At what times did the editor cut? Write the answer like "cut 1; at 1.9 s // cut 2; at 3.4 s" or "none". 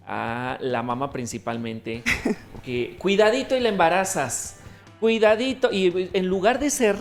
none

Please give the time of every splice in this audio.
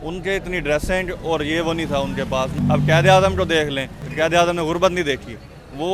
cut 1; at 2.6 s // cut 2; at 4.0 s

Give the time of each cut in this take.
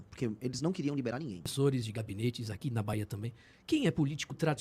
cut 1; at 1.5 s

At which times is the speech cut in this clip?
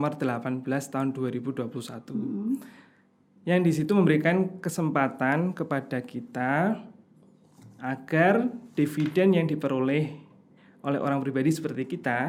none

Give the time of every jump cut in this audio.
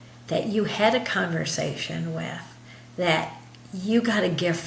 none

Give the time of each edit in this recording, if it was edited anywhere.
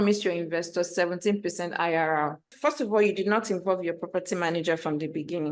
none

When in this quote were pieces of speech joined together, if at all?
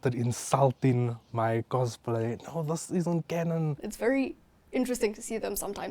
cut 1; at 3.8 s

